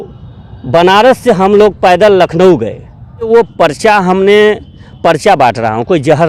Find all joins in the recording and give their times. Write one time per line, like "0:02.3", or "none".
0:03.3